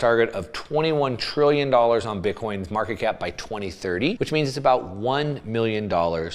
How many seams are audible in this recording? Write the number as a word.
one